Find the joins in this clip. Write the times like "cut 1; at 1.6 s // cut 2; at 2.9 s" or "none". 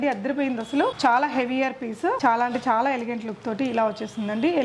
cut 1; at 0.9 s // cut 2; at 2.2 s